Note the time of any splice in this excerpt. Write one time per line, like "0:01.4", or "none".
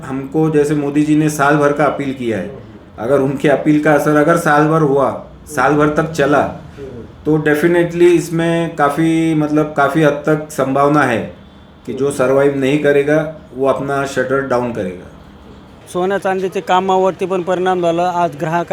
0:15.8